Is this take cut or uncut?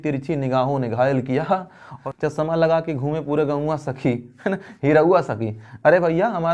cut